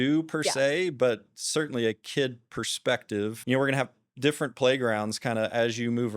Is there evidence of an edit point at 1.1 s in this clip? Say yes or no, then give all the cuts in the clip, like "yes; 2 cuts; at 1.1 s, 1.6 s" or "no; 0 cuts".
no; 1 cut; at 3.4 s